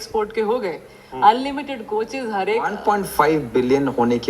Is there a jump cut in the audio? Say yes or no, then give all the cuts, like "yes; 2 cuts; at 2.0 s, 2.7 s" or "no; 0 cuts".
yes; 1 cut; at 2.7 s